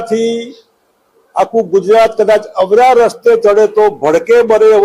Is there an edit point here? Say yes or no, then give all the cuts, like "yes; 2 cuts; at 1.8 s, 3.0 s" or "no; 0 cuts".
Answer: no; 0 cuts